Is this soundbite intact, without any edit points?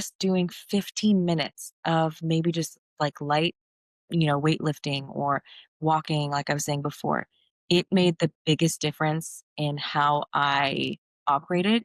yes; 0 cuts

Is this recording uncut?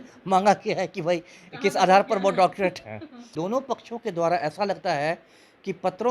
no; 1 cut; at 3.3 s

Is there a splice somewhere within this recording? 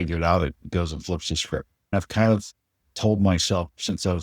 yes; 1 cut; at 1.9 s

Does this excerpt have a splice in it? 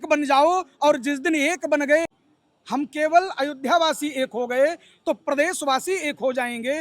yes; 1 cut; at 2.2 s

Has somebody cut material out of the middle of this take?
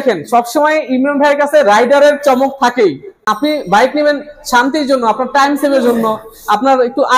yes; 1 cut; at 3.3 s

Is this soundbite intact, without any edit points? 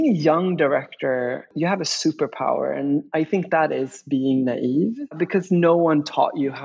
no; 2 cuts; at 1.5 s, 5.2 s

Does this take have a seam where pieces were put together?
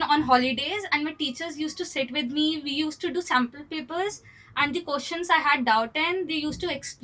no; 0 cuts

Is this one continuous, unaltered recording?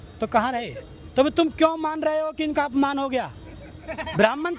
yes; 0 cuts

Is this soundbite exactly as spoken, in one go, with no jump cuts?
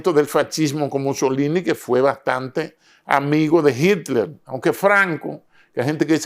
yes; 0 cuts

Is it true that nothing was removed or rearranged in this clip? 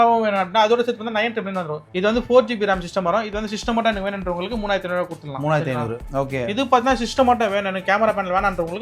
no; 2 cuts; at 1.9 s, 6.0 s

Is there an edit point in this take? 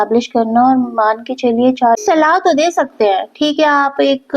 yes; 1 cut; at 2.0 s

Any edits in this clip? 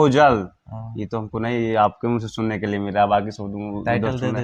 no; 0 cuts

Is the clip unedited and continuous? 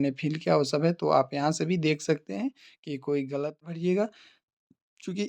no; 1 cut; at 3.6 s

